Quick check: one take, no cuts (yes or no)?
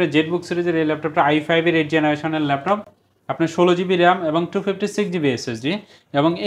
yes